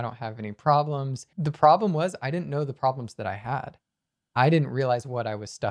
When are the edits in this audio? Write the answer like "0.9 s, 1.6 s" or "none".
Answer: 1.2 s